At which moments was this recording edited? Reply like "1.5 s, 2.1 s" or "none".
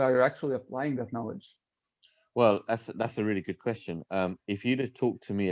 none